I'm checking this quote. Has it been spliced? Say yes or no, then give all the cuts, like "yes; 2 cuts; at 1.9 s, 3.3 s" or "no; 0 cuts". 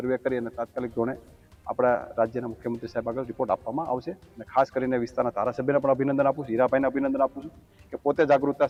no; 0 cuts